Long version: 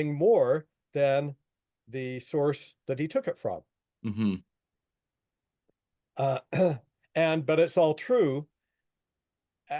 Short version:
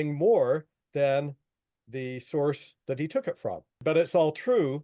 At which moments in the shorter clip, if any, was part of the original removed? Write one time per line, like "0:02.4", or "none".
0:03.8